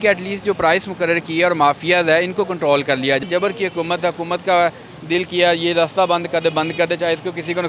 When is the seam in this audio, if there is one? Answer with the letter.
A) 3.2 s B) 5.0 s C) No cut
A